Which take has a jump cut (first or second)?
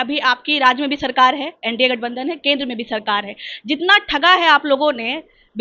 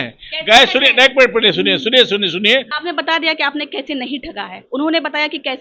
second